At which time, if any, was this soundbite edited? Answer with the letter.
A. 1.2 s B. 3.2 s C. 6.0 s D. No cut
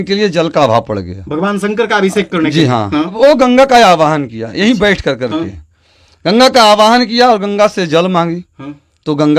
B